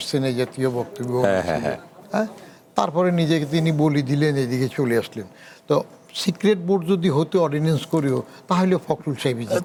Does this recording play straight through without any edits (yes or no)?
yes